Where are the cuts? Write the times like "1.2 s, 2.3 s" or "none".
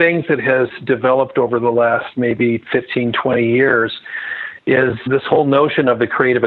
5.0 s